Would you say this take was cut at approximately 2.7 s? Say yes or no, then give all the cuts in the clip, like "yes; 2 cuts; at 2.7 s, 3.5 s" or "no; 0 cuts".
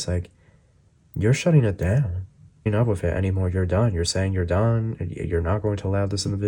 yes; 1 cut; at 2.7 s